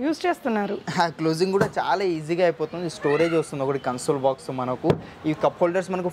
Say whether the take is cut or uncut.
uncut